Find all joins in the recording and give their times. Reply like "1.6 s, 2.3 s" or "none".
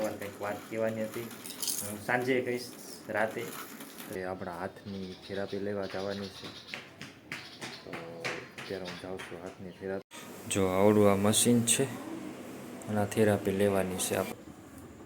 4.1 s, 10.0 s, 14.3 s